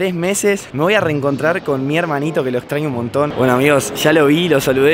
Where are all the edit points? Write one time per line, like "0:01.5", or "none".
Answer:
0:03.3